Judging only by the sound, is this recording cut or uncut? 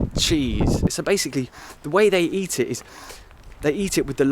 cut